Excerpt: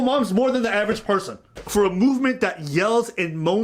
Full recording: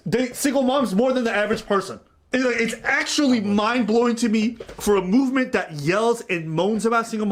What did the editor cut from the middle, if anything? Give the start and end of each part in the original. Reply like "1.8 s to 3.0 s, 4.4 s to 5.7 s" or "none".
2.2 s to 4.7 s